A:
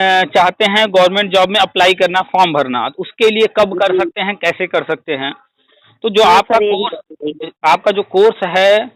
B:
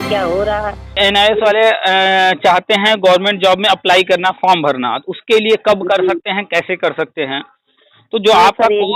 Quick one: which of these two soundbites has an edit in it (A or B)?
B